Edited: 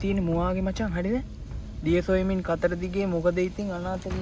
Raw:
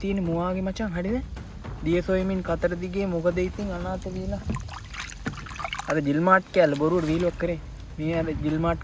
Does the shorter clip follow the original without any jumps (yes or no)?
yes